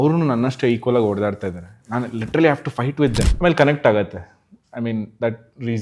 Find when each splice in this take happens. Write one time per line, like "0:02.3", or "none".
0:03.3